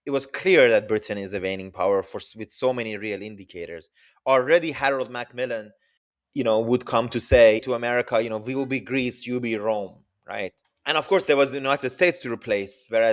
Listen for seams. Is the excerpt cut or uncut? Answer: cut